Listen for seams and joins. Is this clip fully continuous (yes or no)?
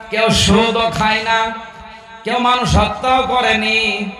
yes